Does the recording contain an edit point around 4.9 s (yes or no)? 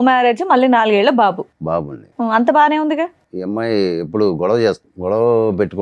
yes